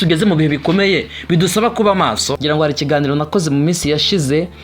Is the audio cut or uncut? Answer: cut